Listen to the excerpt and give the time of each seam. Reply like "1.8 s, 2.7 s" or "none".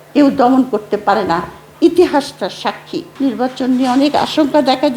3.1 s